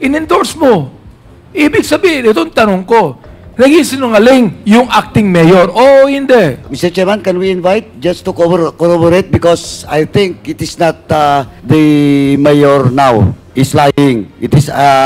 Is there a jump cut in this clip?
yes; 3 cuts; at 6.7 s, 11.5 s, 13.4 s

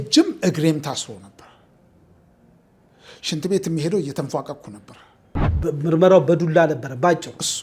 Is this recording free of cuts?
no; 1 cut; at 5.5 s

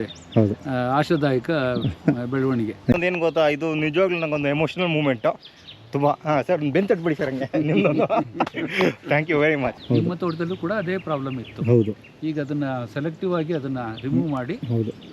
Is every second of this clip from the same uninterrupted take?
no; 2 cuts; at 2.9 s, 9.8 s

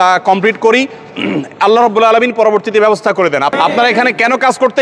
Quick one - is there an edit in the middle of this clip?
yes; 1 cut; at 3.5 s

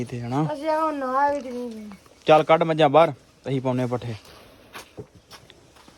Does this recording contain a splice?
no; 0 cuts

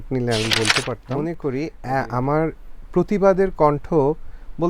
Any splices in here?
yes; 1 cut; at 1.1 s

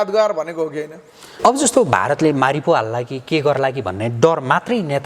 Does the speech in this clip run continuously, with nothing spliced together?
no; 1 cut; at 1.2 s

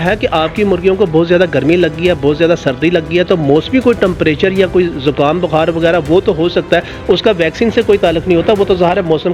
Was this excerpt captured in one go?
yes; 0 cuts

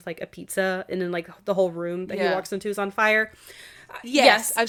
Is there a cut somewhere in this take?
no; 0 cuts

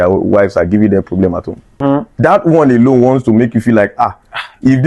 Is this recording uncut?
no; 1 cut; at 1.8 s

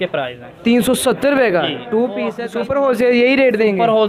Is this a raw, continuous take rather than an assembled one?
no; 1 cut; at 2.4 s

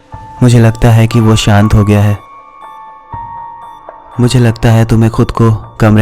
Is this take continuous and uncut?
no; 2 cuts; at 2.4 s, 4.1 s

